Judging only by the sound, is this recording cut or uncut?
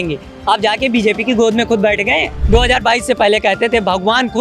cut